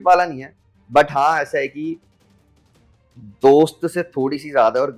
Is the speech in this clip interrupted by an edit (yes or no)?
no